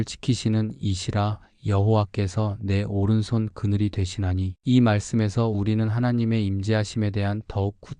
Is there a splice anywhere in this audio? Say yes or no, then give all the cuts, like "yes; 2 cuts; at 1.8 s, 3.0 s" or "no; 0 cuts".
no; 0 cuts